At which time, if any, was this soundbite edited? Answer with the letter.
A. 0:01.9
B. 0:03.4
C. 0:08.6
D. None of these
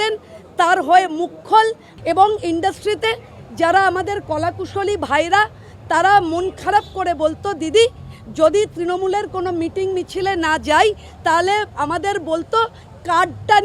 A